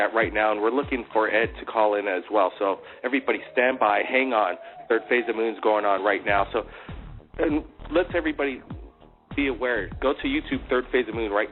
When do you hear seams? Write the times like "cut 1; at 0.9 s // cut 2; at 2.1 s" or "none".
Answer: cut 1; at 4.1 s